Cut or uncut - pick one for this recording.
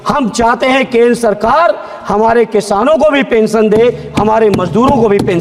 uncut